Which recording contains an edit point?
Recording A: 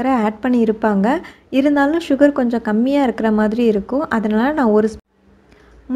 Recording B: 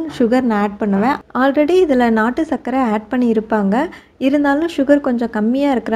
A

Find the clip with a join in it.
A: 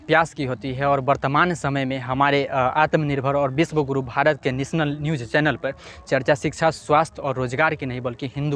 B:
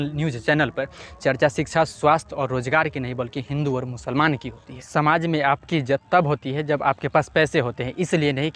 B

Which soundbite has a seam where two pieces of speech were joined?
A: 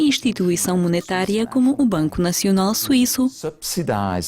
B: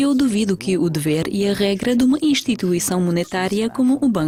A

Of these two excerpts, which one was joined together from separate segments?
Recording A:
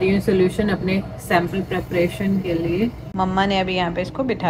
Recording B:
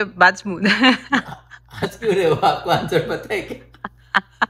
A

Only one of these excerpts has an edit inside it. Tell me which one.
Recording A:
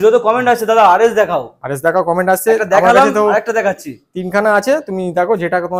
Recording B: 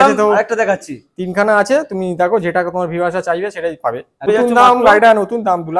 B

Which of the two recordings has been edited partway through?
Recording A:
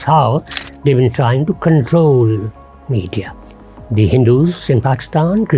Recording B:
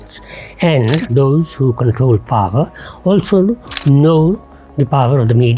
A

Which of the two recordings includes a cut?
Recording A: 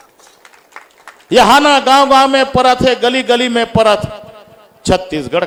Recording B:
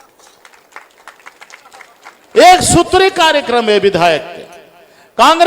B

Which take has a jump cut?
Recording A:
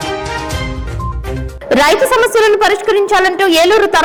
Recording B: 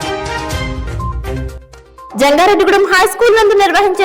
B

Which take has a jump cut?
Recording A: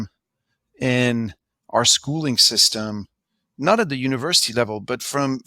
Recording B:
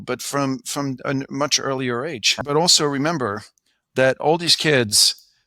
B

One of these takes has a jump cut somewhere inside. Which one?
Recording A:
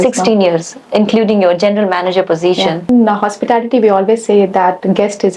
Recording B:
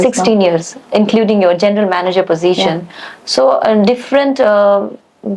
A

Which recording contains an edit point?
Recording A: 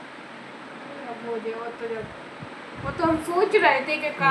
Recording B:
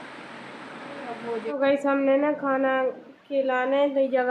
B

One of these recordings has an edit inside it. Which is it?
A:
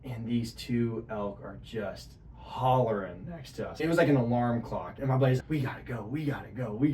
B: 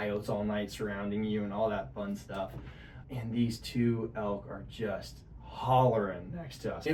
A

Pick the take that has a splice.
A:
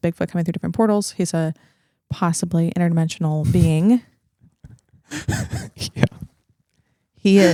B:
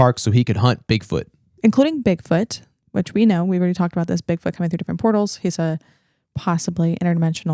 B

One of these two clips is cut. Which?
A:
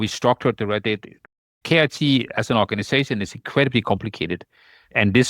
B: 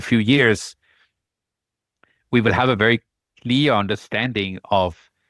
A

